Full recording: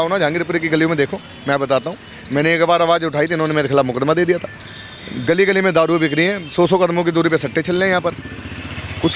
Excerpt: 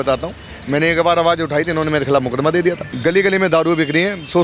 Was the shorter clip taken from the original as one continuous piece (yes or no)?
no